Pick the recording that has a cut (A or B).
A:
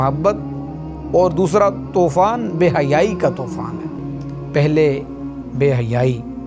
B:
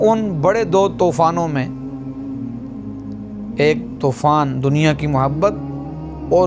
A